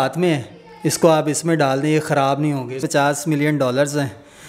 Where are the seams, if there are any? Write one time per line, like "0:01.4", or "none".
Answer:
0:02.8